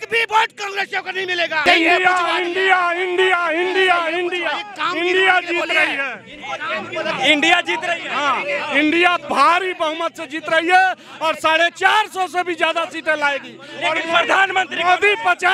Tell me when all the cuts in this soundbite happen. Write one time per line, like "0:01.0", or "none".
0:01.6